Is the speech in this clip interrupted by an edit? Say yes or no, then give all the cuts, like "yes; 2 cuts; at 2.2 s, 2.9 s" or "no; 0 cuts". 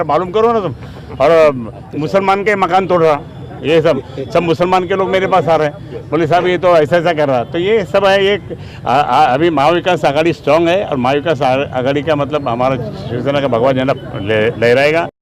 no; 0 cuts